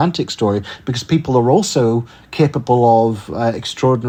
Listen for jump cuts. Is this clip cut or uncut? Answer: uncut